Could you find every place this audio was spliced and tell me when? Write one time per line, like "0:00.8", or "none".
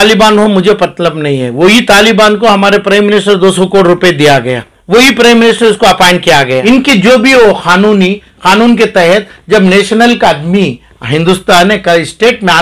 0:06.6